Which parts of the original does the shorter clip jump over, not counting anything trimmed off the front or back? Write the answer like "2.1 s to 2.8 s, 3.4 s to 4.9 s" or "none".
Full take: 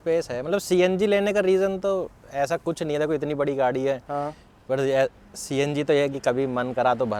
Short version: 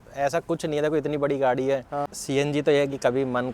4.3 s to 5.3 s